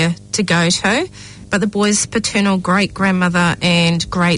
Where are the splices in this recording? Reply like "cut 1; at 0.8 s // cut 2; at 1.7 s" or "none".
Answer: none